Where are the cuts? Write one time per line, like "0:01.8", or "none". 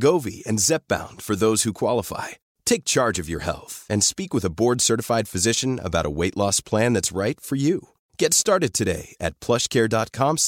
none